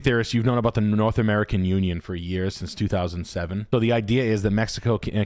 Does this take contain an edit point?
yes; 1 cut; at 3.7 s

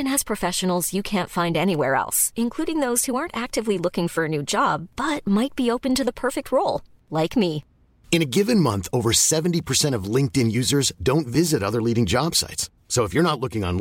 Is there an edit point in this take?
no; 0 cuts

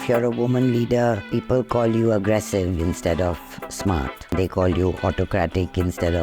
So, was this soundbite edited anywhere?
yes; 1 cut; at 4.3 s

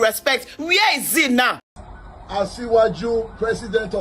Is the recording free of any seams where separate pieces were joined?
no; 1 cut; at 1.7 s

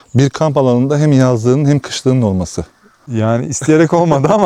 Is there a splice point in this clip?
no; 0 cuts

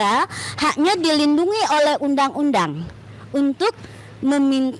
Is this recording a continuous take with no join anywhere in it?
yes; 0 cuts

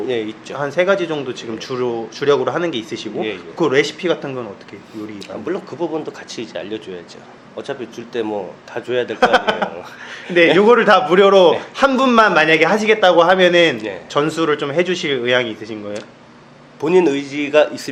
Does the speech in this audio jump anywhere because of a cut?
no; 0 cuts

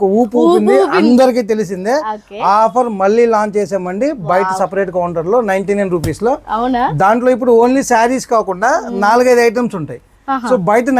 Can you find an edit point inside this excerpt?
no; 0 cuts

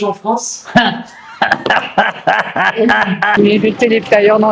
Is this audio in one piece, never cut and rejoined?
no; 1 cut; at 3.3 s

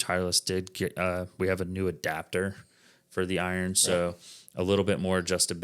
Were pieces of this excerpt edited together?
no; 0 cuts

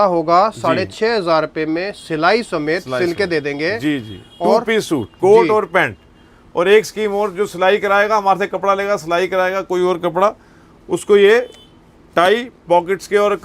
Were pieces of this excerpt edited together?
no; 0 cuts

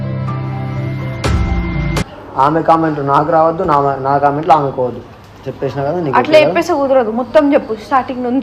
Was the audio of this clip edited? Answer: no; 0 cuts

